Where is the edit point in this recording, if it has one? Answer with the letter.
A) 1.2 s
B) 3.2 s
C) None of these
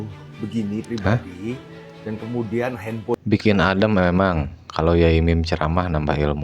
B